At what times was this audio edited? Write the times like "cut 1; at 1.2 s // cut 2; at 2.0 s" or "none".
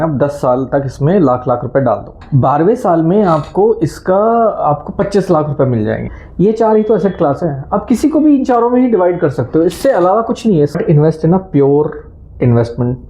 cut 1; at 2.1 s // cut 2; at 6.1 s // cut 3; at 10.8 s